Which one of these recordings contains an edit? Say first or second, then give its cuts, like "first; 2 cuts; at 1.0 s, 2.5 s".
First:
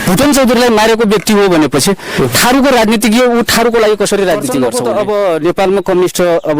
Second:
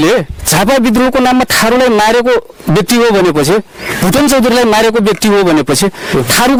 first; 1 cut; at 4.7 s